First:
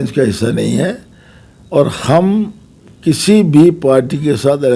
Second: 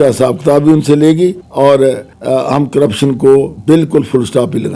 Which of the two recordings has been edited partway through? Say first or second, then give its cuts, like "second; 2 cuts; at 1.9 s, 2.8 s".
second; 3 cuts; at 1.4 s, 2.1 s, 3.5 s